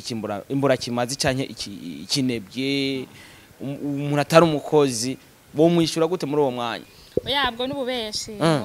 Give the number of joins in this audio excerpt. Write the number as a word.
one